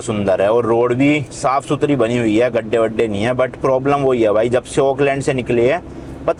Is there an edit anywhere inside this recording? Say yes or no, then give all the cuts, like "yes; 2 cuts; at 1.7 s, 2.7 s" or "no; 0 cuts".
no; 0 cuts